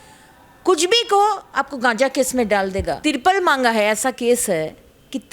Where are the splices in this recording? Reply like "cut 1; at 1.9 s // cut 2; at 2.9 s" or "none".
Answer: cut 1; at 2.9 s